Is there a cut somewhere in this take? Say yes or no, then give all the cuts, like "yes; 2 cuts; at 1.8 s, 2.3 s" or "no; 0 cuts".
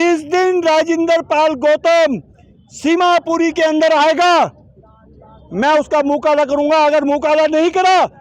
no; 0 cuts